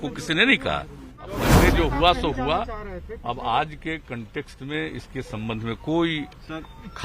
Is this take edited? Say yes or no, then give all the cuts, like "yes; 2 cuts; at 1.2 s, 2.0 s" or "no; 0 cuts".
yes; 1 cut; at 1.5 s